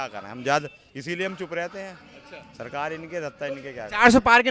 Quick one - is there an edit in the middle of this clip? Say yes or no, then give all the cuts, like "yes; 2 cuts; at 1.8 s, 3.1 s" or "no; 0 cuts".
no; 0 cuts